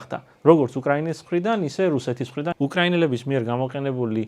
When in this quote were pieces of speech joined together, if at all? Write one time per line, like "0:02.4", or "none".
0:02.5